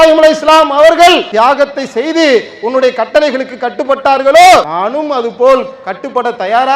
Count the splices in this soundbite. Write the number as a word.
two